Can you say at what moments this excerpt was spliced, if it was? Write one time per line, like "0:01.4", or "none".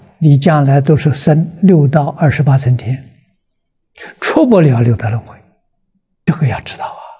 0:06.3

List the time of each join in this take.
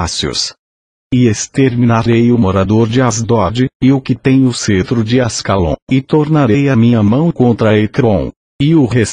0:01.0
0:02.6

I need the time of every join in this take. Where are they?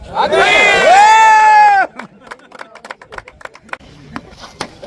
0:03.3

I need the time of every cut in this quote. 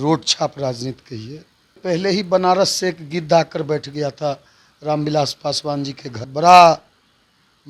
0:01.7
0:06.3

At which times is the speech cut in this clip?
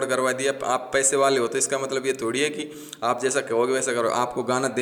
none

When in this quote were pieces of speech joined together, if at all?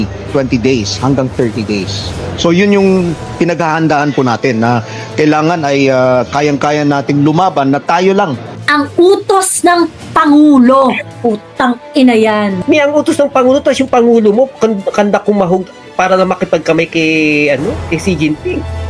0:08.6
0:12.6

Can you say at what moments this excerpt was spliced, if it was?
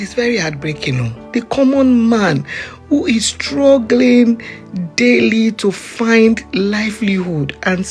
0:01.2

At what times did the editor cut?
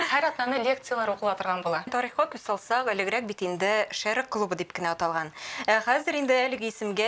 0:01.9

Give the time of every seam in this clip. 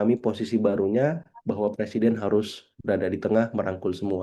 none

